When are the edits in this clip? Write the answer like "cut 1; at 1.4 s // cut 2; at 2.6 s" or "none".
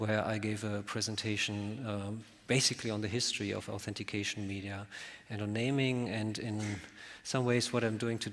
none